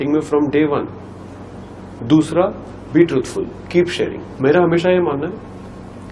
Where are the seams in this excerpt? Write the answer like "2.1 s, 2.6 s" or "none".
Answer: 4.2 s